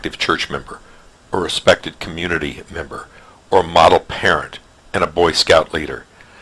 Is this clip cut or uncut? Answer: uncut